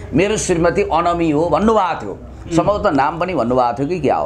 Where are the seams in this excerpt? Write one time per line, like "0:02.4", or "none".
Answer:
none